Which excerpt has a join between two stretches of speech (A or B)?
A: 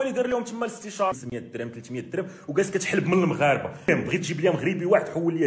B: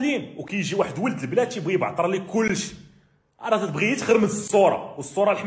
A